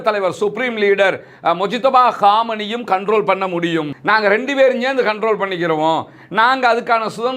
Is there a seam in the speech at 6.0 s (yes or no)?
no